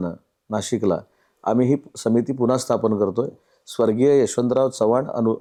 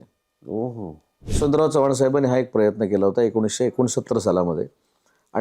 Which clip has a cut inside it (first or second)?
second